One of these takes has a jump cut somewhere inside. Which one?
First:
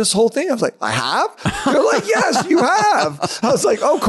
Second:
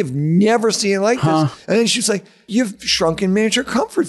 second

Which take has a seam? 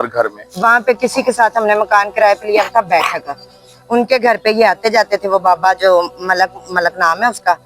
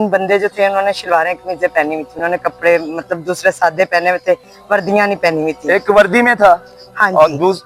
first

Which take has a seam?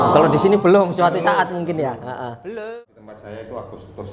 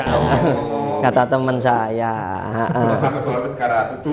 first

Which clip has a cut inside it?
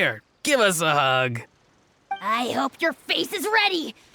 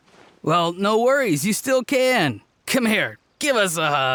first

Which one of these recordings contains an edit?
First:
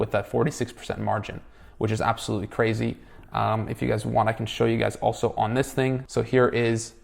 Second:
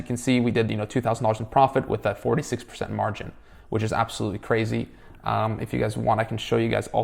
first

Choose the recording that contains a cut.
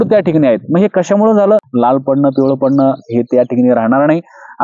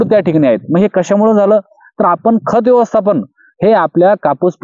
first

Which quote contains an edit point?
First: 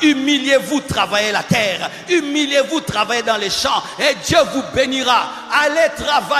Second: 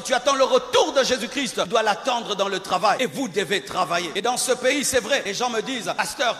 second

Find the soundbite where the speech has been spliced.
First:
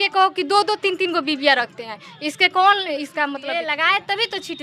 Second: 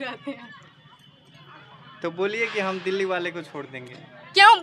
first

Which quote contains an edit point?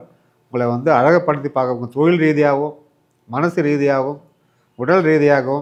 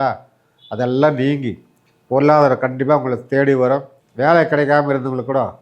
second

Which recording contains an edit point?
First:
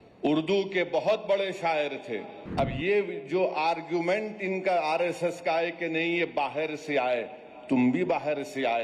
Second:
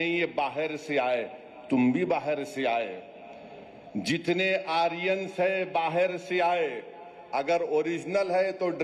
first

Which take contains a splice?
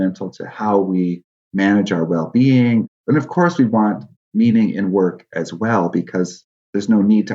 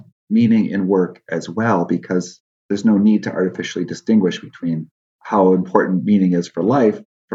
first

